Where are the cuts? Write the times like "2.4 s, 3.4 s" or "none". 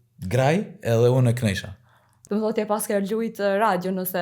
2.2 s